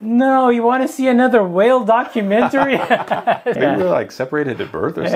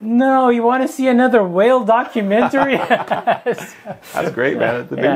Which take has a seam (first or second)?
first